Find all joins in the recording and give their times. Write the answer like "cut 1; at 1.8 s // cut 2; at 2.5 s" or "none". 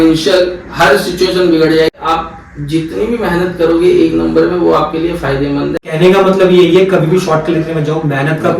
cut 1; at 1.9 s // cut 2; at 5.8 s

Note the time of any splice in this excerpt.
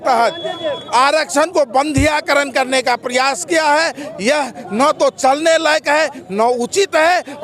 none

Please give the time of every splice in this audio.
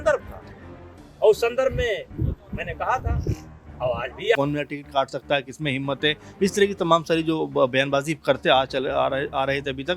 cut 1; at 4.4 s

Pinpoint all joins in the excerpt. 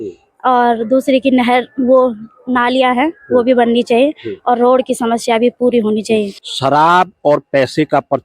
cut 1; at 6.4 s

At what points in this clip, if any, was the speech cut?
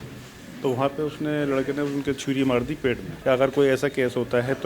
cut 1; at 3.1 s

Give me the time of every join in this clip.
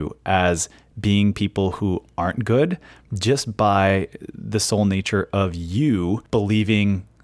cut 1; at 6.2 s

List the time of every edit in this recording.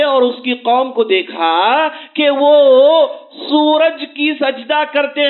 none

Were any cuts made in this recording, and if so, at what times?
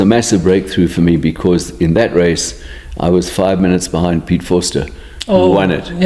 none

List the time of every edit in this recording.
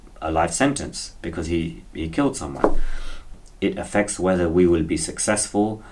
cut 1; at 3.4 s

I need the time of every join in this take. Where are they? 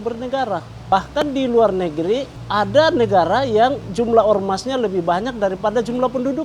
cut 1; at 0.9 s // cut 2; at 2.4 s

